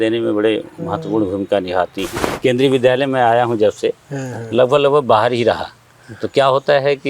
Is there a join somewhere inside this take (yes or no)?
yes